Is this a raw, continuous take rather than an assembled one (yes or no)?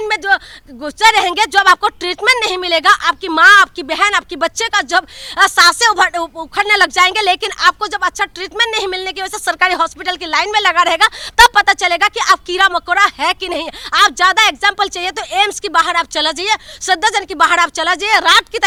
yes